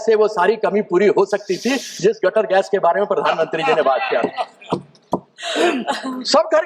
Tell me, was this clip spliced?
no; 0 cuts

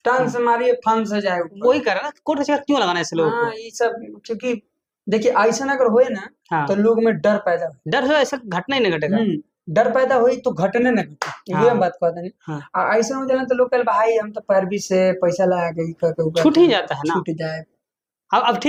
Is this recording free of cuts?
yes; 0 cuts

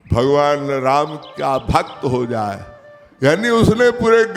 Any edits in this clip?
no; 0 cuts

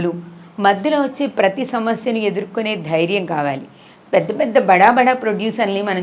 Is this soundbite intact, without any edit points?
yes; 0 cuts

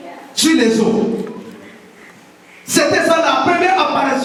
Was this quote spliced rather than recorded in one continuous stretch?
no; 0 cuts

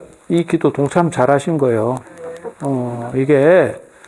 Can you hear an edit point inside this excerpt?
no; 0 cuts

